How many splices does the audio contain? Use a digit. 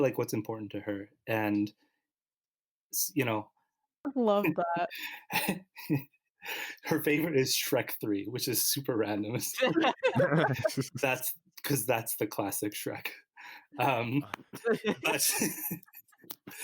1